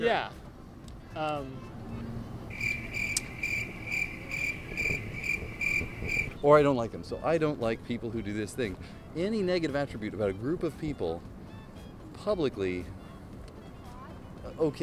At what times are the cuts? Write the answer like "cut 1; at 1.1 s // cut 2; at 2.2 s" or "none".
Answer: cut 1; at 6.3 s